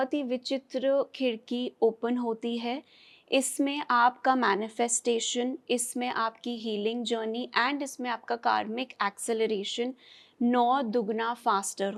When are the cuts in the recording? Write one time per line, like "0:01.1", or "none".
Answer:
none